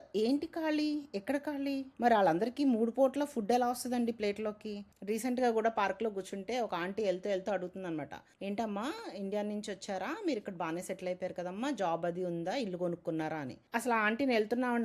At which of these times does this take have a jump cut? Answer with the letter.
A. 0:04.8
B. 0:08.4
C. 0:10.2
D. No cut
A